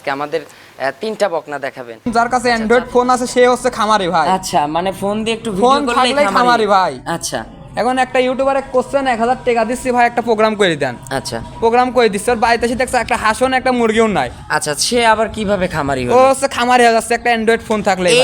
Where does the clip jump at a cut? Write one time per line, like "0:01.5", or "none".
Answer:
0:02.1